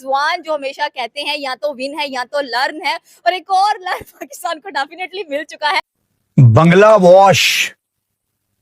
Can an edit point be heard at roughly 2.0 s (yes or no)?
no